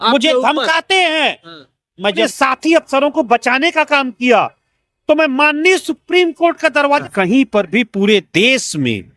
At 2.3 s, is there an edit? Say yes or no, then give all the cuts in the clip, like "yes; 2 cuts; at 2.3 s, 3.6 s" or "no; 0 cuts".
yes; 2 cuts; at 2.3 s, 7.0 s